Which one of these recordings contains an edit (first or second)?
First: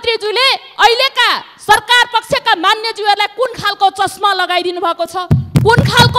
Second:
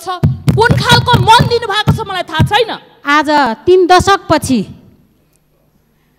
second